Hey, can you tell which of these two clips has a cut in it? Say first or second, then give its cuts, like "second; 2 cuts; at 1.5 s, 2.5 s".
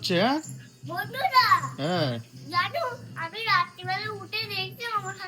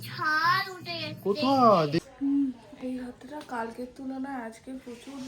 second; 1 cut; at 2.1 s